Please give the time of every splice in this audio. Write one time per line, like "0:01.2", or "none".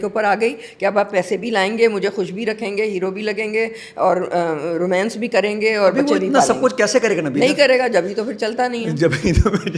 none